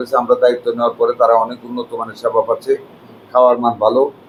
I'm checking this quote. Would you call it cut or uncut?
uncut